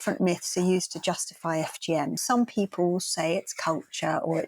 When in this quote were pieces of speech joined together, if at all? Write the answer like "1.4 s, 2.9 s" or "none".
2.2 s